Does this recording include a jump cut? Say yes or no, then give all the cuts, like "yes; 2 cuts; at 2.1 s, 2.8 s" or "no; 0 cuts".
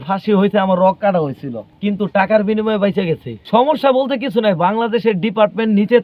yes; 1 cut; at 3.3 s